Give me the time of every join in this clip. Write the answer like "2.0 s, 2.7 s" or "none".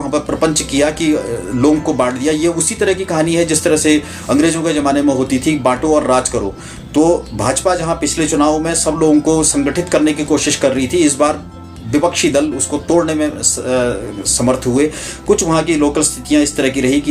none